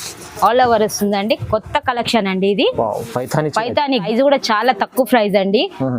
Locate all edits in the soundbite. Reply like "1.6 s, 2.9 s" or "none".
4.0 s